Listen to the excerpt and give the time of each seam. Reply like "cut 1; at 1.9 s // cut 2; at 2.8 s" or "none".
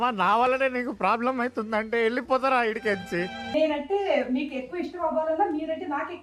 cut 1; at 3.5 s